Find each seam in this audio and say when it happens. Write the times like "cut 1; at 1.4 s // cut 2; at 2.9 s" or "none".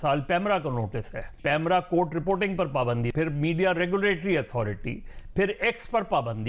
cut 1; at 1.4 s // cut 2; at 3.1 s